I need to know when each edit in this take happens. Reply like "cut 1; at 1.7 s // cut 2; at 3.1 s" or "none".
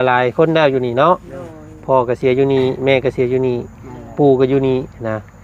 none